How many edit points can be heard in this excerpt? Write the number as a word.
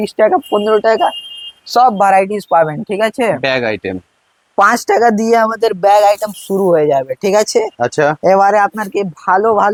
zero